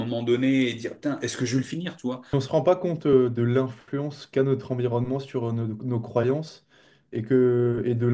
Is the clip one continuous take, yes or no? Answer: no